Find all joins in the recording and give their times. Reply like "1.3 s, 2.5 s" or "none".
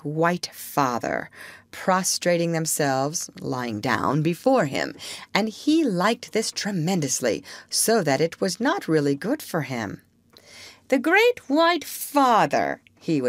11.9 s